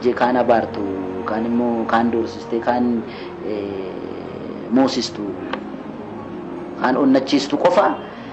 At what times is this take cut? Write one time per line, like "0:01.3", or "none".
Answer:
none